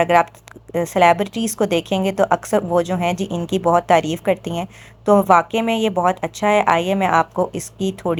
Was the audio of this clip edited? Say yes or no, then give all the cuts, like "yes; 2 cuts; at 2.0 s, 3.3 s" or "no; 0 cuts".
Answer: no; 0 cuts